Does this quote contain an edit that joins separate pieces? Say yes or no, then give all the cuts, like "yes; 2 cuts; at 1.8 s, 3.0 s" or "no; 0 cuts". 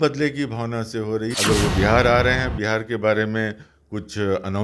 yes; 1 cut; at 1.3 s